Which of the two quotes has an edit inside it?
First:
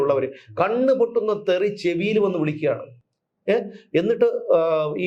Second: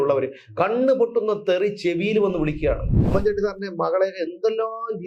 second; 1 cut; at 2.9 s

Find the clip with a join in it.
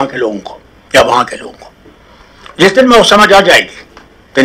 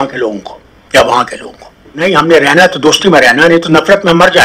second; 1 cut; at 2.0 s

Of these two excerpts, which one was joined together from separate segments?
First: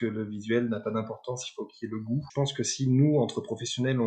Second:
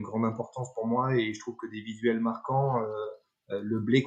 first; 1 cut; at 2.3 s

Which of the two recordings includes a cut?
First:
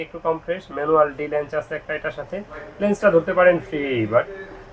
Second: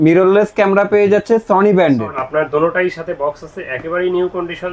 second; 1 cut; at 2.2 s

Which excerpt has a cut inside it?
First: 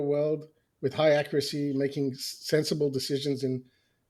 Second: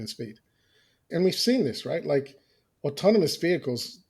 second; 1 cut; at 1.0 s

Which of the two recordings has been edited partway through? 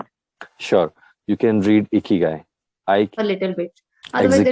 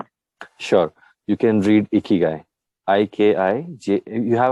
first; 1 cut; at 3.1 s

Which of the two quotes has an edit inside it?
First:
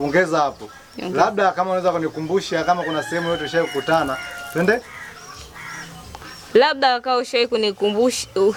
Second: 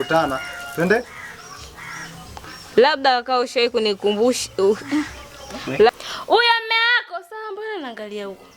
second; 1 cut; at 5.9 s

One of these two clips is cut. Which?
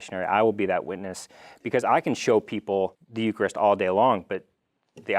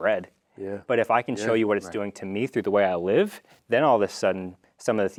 first; 1 cut; at 3.0 s

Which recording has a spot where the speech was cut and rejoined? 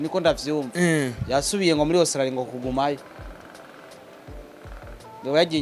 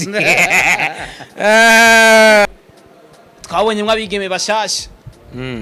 second; 1 cut; at 2.5 s

